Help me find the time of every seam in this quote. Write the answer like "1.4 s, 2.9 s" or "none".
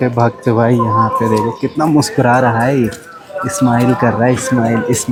none